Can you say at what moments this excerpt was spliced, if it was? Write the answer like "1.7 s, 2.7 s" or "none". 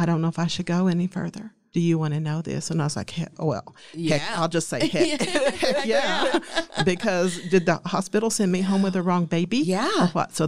none